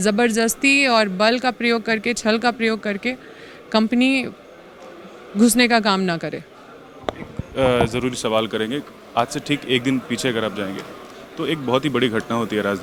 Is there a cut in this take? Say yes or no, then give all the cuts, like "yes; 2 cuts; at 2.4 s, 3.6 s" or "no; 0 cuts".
no; 0 cuts